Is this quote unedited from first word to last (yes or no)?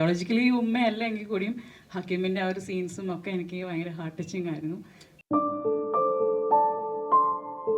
yes